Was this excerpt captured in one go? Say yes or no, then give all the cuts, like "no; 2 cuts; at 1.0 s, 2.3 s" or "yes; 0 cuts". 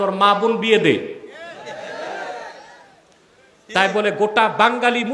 yes; 0 cuts